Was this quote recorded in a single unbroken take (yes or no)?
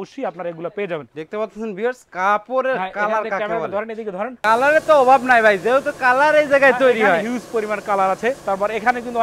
no